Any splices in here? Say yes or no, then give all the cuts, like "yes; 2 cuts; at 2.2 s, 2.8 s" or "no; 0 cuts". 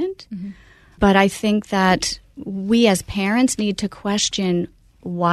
yes; 1 cut; at 1.0 s